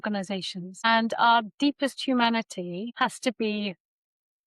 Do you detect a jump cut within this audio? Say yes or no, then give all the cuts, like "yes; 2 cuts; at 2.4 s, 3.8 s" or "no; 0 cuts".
no; 0 cuts